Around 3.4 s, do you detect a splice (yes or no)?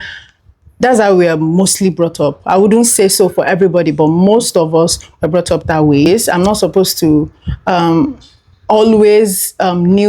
no